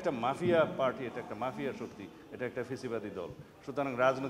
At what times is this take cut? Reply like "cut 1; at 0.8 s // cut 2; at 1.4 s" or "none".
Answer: none